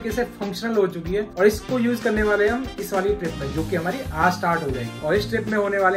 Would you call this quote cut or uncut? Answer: uncut